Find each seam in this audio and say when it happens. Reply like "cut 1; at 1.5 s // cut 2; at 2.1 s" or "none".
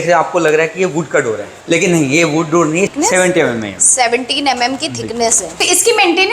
cut 1; at 1.5 s // cut 2; at 2.9 s // cut 3; at 5.6 s